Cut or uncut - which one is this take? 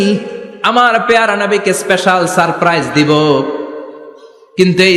uncut